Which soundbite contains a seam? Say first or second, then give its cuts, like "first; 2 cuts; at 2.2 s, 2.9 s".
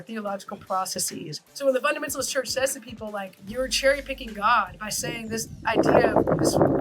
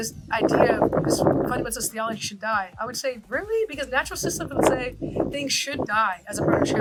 first; 2 cuts; at 1.4 s, 3.4 s